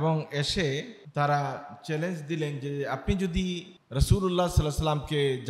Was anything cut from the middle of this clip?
yes; 2 cuts; at 1.0 s, 3.7 s

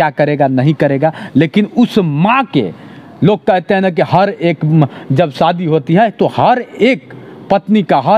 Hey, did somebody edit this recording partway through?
no; 0 cuts

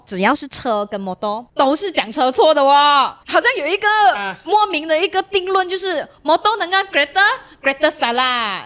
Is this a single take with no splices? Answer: yes; 0 cuts

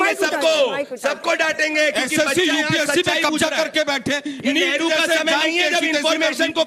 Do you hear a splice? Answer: no; 0 cuts

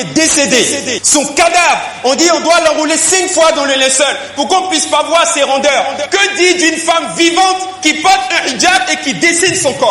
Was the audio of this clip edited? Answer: no; 0 cuts

